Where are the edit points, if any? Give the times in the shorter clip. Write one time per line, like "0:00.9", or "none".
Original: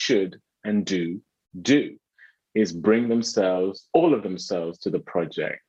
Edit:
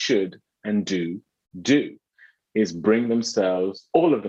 none